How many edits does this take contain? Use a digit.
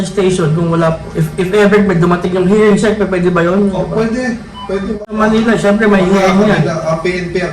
1